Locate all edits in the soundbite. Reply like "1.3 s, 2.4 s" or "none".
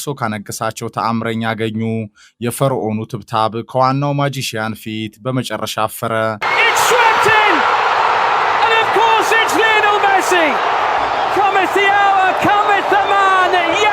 6.4 s